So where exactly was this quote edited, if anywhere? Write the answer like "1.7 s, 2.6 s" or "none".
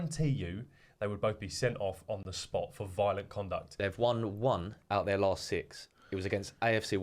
3.7 s